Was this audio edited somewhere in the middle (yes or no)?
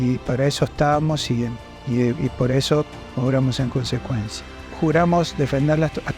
yes